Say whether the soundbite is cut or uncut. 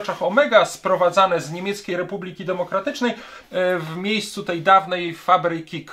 cut